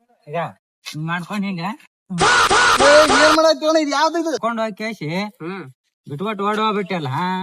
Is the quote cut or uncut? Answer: cut